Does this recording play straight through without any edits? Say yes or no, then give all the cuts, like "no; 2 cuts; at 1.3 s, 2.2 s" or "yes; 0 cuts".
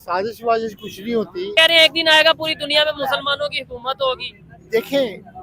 no; 1 cut; at 1.5 s